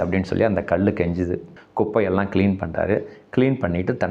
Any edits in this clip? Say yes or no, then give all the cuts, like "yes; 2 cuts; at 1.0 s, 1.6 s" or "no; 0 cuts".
yes; 1 cut; at 1.5 s